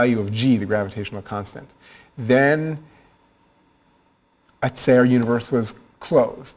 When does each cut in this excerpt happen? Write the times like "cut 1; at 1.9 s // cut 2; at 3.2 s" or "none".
none